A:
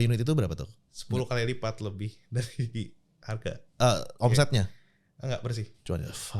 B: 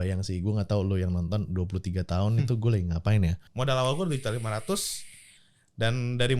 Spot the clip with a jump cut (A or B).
B